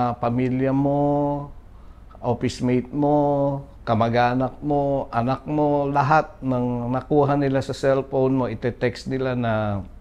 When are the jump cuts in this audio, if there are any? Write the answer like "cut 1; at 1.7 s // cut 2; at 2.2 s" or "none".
none

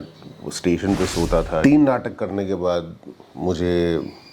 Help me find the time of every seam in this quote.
cut 1; at 1.6 s

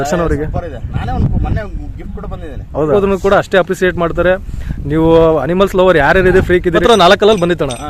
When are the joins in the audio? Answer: cut 1; at 2.9 s // cut 2; at 6.8 s

